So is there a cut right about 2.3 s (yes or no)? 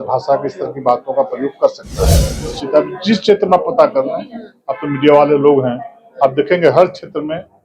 yes